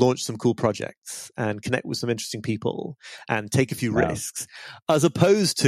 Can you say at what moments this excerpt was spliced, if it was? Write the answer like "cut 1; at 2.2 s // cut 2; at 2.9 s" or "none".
none